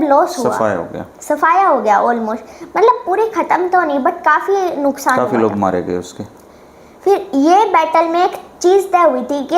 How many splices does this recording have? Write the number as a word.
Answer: zero